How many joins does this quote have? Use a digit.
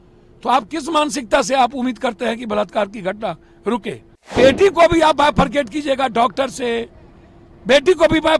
1